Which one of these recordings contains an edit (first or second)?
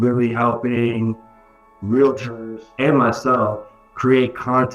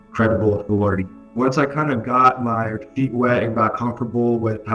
second